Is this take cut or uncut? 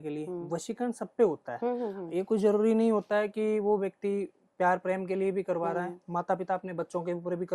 uncut